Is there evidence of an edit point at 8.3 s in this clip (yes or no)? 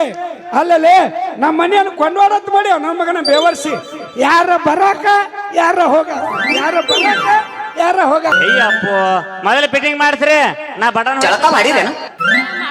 yes